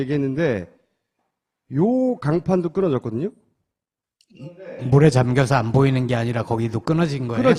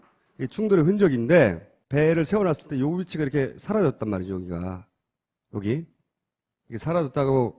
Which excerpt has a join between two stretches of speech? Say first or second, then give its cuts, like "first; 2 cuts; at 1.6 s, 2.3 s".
second; 1 cut; at 6.0 s